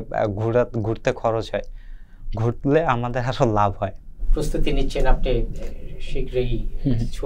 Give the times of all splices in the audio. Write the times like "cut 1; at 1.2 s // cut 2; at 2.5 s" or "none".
none